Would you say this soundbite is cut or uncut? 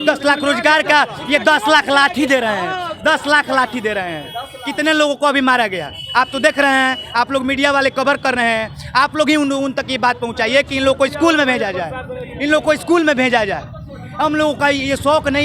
uncut